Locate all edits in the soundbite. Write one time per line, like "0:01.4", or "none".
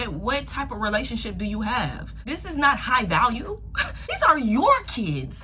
0:02.3
0:04.2